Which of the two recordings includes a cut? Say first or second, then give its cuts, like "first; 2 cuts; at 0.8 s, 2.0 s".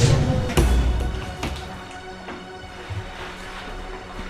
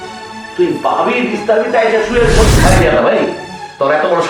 second; 1 cut; at 2.5 s